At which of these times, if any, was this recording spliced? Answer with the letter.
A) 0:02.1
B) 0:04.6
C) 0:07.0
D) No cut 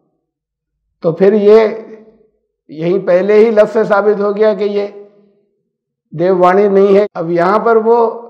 C